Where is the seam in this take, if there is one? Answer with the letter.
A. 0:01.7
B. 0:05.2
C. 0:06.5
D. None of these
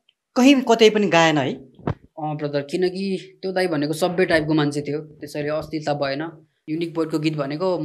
C